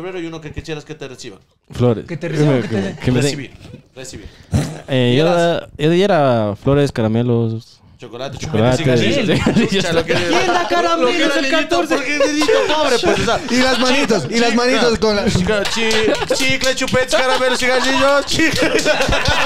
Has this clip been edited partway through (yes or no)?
no